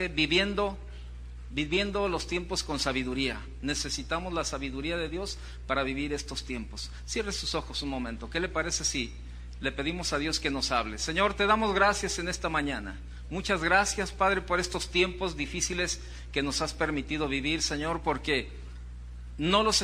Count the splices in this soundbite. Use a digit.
1